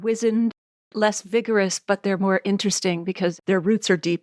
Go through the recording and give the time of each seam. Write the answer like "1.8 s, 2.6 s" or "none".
3.4 s